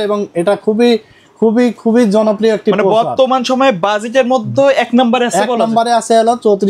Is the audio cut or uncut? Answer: uncut